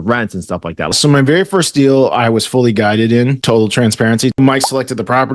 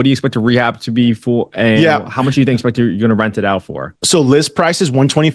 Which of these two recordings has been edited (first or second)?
first